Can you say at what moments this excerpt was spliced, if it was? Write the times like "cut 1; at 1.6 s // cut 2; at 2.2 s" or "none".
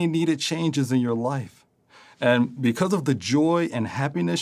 cut 1; at 1.9 s